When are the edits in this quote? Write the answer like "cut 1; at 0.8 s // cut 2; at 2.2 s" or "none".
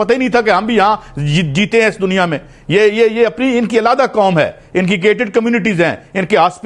none